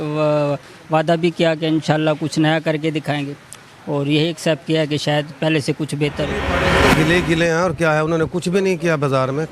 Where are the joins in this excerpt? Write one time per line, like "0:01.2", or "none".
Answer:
0:06.6